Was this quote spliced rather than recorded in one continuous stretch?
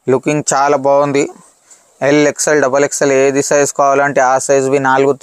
no; 0 cuts

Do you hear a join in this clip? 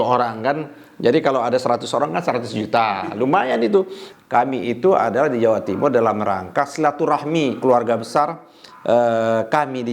yes; 1 cut; at 4.0 s

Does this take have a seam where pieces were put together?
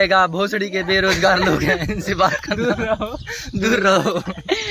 no; 0 cuts

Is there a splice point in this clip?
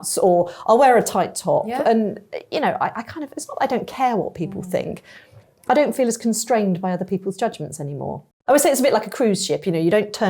yes; 1 cut; at 8.3 s

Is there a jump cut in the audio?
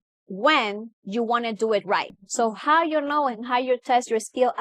yes; 1 cut; at 2.2 s

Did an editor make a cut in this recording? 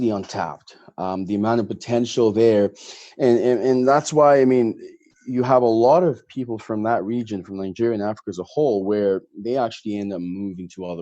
no; 0 cuts

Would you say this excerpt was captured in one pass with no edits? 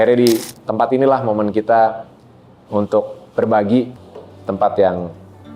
no; 1 cut; at 3.9 s

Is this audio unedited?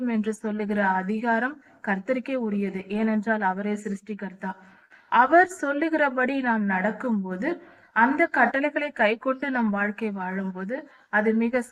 yes; 0 cuts

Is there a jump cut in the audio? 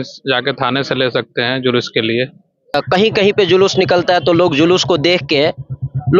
yes; 1 cut; at 2.6 s

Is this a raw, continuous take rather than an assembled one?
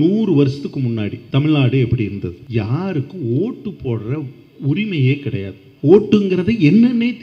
no; 2 cuts; at 1.2 s, 2.4 s

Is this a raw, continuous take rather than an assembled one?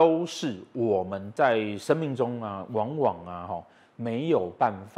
yes; 0 cuts

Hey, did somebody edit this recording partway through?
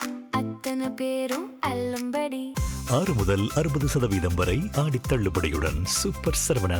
no; 0 cuts

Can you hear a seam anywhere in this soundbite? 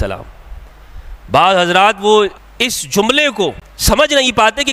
yes; 2 cuts; at 2.4 s, 3.7 s

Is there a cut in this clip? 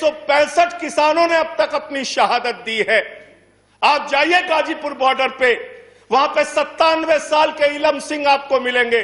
no; 0 cuts

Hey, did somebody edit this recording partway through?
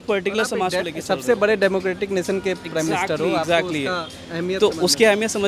no; 0 cuts

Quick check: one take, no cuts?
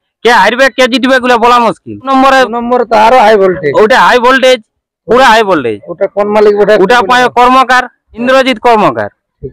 no; 2 cuts; at 2.1 s, 8.2 s

